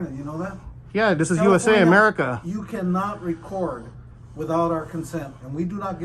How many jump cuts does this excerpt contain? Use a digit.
0